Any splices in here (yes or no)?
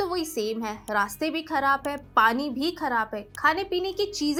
no